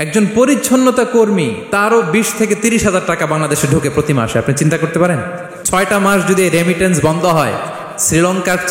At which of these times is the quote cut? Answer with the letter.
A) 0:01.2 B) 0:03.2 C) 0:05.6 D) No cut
C